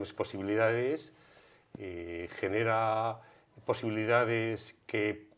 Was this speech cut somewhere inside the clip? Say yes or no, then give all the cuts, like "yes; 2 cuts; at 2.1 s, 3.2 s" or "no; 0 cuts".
no; 0 cuts